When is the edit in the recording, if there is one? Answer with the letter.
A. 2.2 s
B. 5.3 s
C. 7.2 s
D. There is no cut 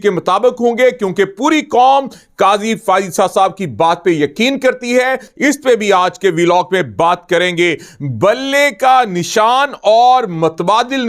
B